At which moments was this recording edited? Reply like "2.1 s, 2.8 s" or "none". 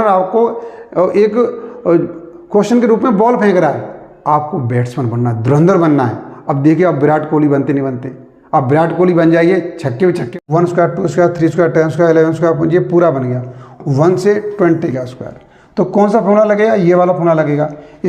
10.2 s

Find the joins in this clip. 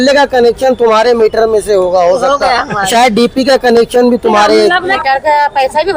5.0 s

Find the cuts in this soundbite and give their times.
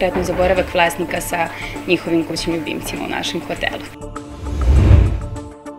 4.0 s

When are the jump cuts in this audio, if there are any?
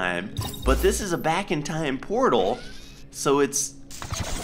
none

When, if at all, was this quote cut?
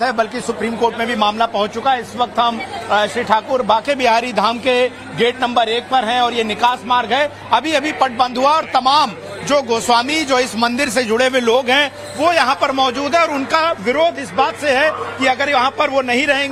none

